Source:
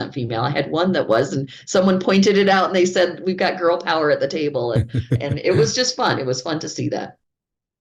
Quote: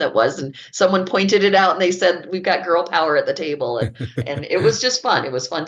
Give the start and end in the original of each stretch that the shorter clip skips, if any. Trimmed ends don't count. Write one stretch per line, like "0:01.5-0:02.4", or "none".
none